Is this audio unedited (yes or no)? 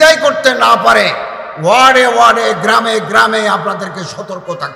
yes